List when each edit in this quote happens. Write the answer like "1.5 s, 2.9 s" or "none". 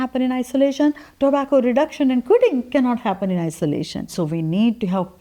4.0 s